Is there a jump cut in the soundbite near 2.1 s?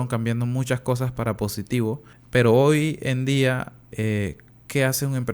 yes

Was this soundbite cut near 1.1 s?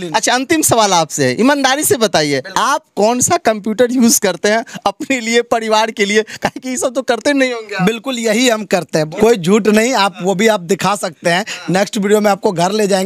no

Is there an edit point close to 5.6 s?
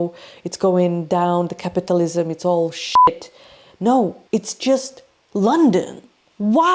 no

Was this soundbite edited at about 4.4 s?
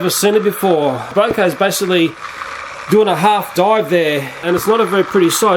yes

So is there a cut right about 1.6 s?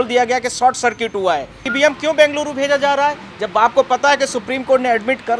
yes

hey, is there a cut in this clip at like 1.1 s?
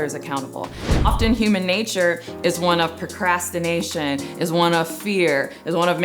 yes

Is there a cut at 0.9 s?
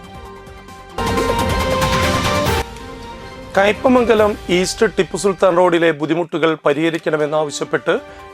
yes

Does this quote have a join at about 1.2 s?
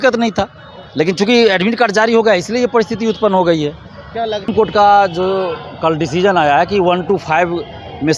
no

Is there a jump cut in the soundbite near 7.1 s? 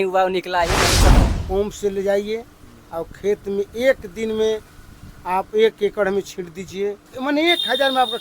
yes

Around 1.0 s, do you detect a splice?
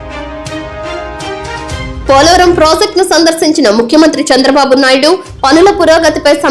yes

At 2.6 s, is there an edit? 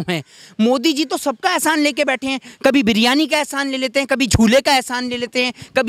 no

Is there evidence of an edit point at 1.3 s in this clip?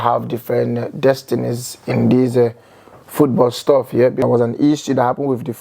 no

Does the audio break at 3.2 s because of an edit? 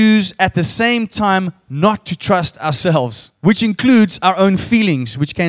yes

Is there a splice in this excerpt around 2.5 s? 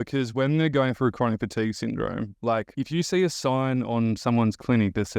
yes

